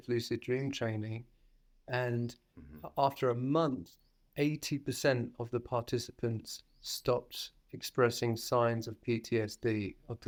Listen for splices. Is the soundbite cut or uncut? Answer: uncut